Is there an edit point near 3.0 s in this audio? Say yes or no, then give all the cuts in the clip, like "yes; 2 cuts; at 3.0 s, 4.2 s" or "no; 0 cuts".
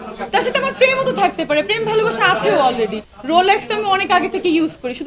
yes; 1 cut; at 3.0 s